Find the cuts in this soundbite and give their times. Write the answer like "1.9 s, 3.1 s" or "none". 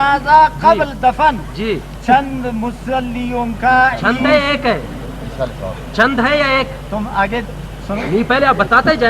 none